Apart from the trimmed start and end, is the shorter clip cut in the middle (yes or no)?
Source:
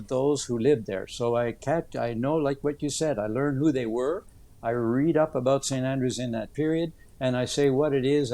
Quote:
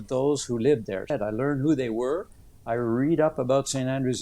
yes